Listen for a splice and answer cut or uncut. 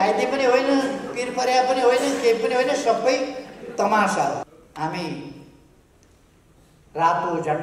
cut